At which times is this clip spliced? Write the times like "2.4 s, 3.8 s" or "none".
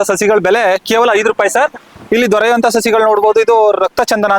none